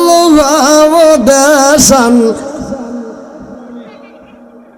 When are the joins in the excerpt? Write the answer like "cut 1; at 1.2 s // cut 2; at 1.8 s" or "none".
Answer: none